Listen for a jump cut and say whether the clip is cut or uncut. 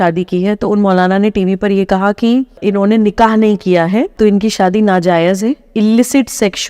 cut